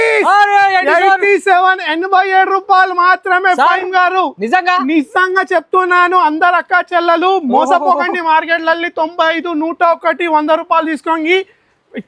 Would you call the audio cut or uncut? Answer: uncut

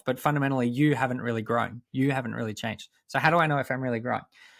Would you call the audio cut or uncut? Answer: uncut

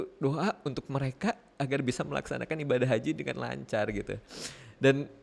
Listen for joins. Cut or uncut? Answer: uncut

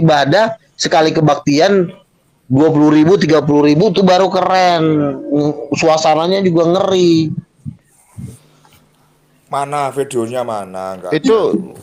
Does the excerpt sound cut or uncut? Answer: uncut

